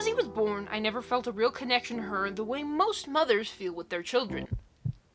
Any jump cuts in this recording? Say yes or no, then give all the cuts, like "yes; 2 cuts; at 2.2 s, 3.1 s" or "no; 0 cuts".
no; 0 cuts